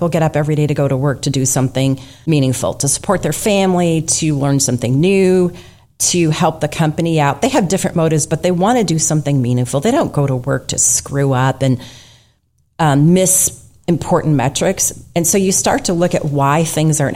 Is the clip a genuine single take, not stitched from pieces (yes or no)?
no